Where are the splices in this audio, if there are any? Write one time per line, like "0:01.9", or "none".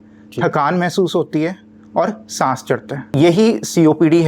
0:03.0